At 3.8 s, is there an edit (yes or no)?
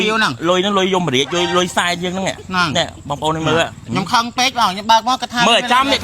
yes